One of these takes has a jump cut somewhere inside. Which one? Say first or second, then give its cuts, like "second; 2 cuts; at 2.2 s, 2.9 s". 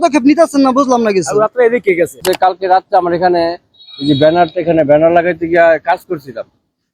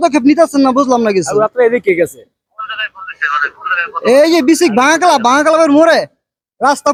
first; 1 cut; at 2.2 s